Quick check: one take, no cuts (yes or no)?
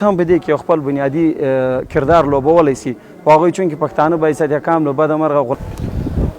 yes